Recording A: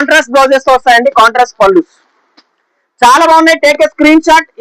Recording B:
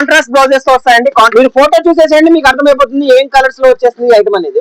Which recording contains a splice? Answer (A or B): B